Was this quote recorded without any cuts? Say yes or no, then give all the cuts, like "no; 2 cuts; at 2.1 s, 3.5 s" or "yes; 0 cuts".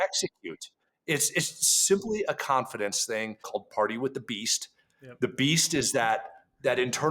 no; 1 cut; at 3.4 s